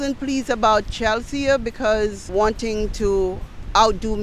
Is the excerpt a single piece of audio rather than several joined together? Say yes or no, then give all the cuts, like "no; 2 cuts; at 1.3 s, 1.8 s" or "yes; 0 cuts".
no; 1 cut; at 2.2 s